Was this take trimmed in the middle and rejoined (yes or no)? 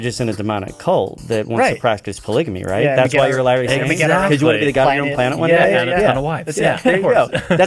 no